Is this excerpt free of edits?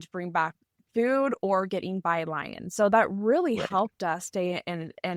yes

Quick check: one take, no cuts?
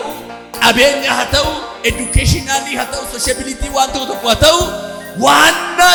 yes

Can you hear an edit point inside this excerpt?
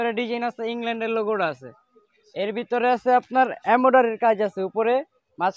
no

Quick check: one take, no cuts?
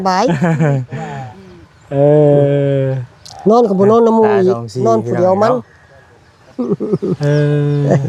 yes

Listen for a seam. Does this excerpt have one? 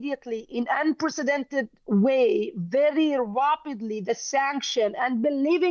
no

